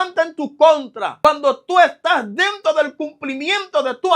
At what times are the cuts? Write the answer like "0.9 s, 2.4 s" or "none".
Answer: 1.1 s